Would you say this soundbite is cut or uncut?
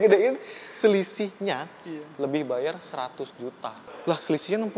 cut